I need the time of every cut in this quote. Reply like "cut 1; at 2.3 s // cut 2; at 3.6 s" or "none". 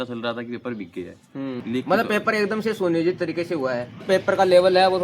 cut 1; at 1.6 s // cut 2; at 4.0 s